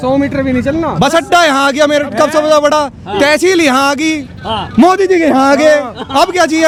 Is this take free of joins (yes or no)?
yes